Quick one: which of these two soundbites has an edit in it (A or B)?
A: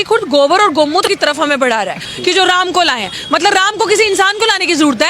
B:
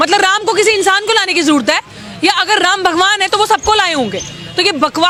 A